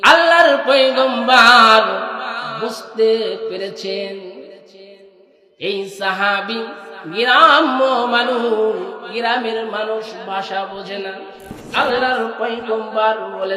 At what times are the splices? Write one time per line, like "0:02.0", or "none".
0:11.9

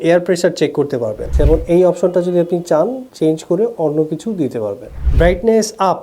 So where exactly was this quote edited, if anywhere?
0:01.3
0:04.9

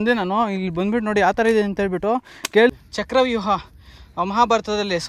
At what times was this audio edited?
0:02.7

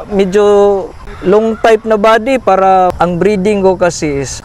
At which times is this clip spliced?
0:01.0
0:02.9

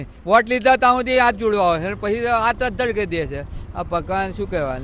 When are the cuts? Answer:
none

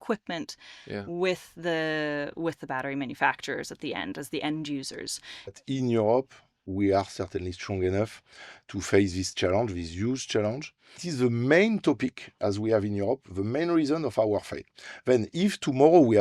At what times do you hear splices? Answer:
0:05.6
0:11.0

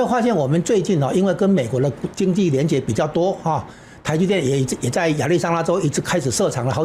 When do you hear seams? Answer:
none

